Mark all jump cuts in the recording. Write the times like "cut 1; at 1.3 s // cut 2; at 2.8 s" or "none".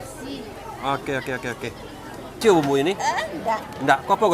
cut 1; at 2.4 s